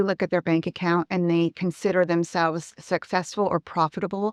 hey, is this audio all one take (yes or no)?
yes